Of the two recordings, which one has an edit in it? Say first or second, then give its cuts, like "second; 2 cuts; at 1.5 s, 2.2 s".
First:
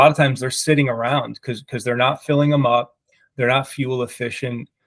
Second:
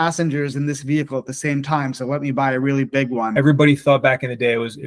second; 1 cut; at 3.3 s